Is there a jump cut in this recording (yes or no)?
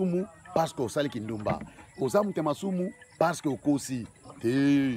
no